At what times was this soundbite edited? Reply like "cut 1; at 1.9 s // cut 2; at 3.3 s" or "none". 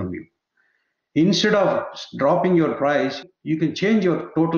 cut 1; at 3.2 s